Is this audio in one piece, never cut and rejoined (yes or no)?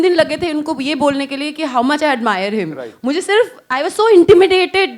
yes